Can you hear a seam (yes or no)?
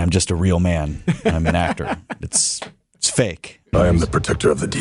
yes